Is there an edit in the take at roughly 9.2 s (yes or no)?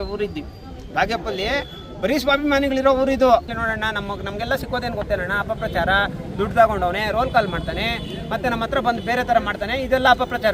no